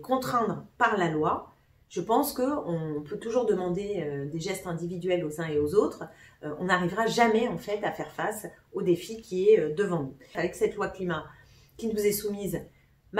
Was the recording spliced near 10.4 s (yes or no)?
yes